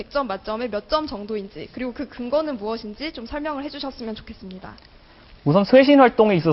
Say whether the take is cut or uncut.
cut